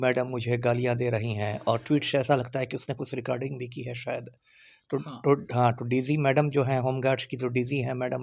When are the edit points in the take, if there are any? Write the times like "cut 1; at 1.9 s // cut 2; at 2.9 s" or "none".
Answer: none